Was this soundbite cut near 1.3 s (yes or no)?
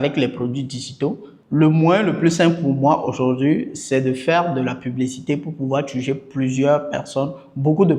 yes